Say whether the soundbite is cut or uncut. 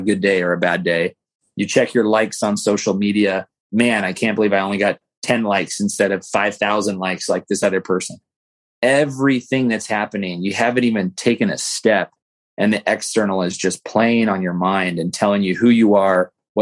cut